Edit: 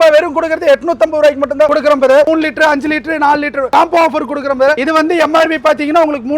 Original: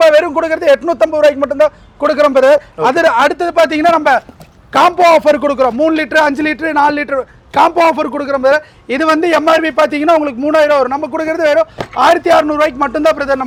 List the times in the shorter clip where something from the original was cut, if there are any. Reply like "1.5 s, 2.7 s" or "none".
2.2 s, 3.7 s, 4.8 s